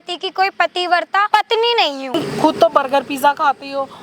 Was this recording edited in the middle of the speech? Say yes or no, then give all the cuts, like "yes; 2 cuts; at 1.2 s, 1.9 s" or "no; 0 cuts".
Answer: yes; 2 cuts; at 1.3 s, 2.1 s